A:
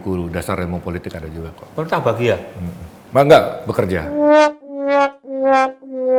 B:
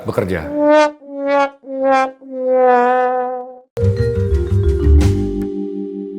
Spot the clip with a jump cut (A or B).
B